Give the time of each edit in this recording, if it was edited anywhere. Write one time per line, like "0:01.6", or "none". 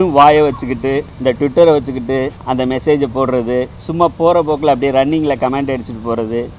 0:01.1
0:02.4
0:03.8

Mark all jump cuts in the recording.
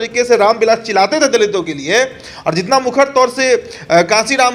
none

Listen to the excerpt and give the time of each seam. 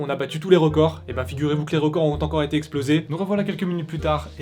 0:03.1

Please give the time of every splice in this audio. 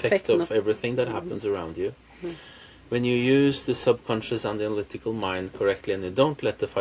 none

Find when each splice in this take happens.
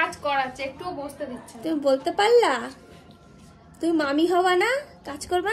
none

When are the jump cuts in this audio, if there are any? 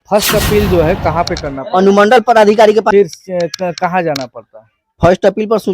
0:02.9

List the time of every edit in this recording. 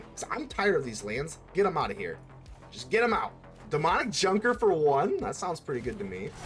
0:03.5

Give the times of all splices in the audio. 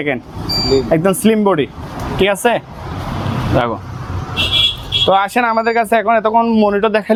none

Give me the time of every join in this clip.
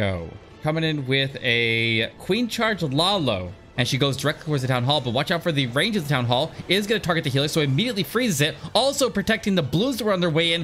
0:03.6

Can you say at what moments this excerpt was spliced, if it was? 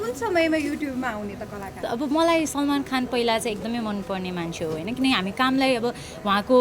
0:01.8

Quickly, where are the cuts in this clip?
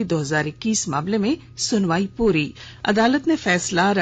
0:01.1

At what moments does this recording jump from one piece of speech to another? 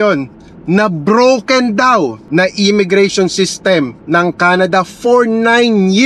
0:02.2

